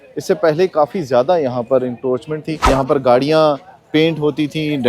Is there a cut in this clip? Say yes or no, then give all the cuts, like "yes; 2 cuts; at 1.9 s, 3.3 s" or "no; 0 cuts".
yes; 1 cut; at 2.7 s